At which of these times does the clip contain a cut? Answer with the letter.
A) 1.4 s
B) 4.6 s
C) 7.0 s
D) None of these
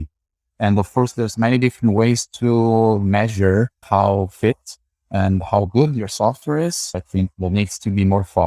C